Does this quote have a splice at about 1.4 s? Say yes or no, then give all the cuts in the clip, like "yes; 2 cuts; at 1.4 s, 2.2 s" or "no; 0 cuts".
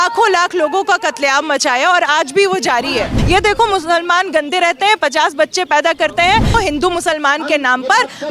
no; 2 cuts; at 3.2 s, 6.5 s